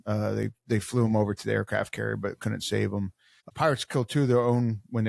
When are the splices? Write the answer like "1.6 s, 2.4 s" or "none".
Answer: 3.5 s